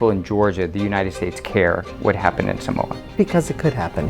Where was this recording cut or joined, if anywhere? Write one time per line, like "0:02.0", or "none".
0:03.0